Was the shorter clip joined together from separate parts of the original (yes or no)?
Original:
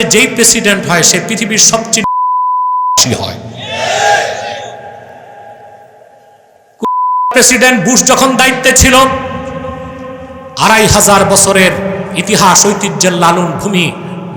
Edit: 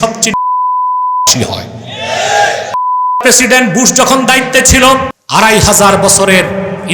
yes